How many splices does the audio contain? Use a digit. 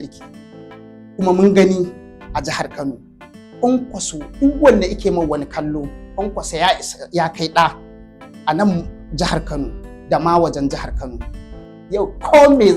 1